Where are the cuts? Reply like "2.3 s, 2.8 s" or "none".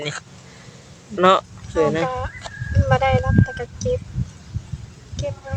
1.1 s